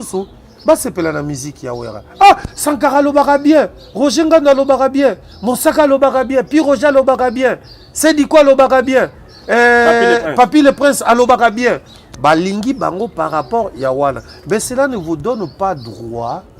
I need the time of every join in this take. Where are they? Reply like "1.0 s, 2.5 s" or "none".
none